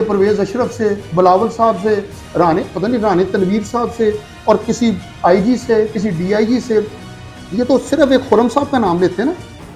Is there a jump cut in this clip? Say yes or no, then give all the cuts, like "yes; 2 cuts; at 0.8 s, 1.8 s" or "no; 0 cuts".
no; 0 cuts